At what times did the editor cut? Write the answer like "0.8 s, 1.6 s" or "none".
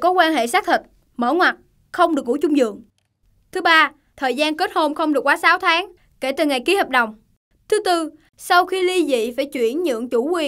none